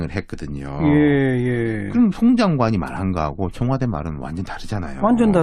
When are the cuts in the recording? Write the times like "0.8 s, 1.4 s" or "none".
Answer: none